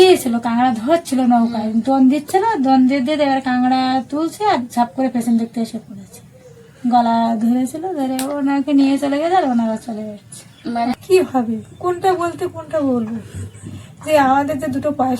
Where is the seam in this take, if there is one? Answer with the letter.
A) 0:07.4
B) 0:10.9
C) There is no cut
B